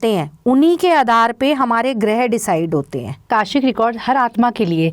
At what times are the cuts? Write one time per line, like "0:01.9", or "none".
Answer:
0:03.3

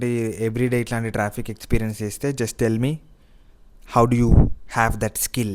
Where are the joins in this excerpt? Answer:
0:04.6

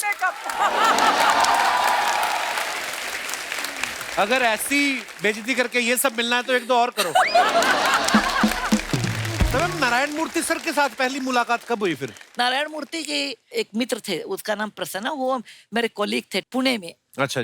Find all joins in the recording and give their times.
0:09.5

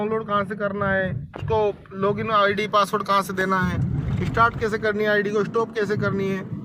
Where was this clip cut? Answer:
none

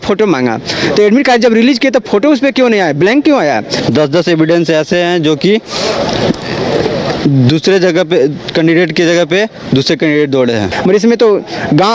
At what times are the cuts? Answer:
0:03.7
0:10.7

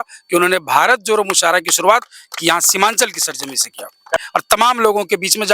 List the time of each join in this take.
0:04.1

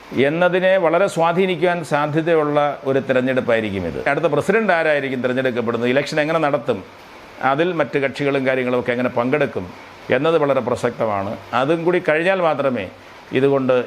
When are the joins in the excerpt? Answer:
0:04.1

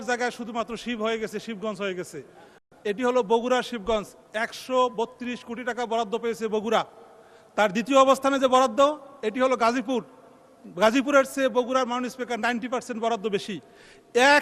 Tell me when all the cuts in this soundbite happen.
0:02.5

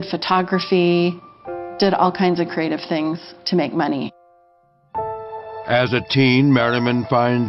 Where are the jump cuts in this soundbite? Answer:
none

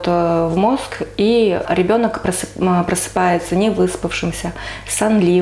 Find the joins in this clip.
0:01.6

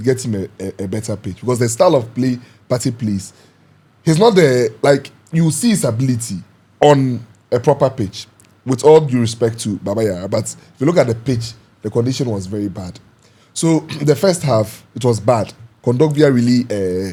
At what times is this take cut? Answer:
none

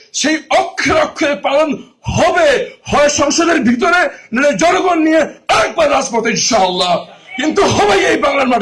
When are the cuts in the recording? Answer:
none

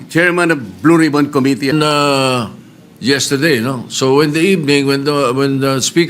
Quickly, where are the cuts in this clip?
0:01.7

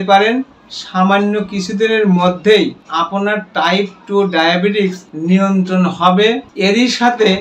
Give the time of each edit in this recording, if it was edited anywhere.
0:02.8
0:05.1
0:06.5

